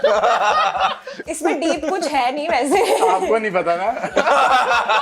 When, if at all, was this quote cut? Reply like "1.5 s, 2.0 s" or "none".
1.2 s